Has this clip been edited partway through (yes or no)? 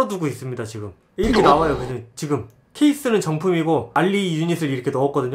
yes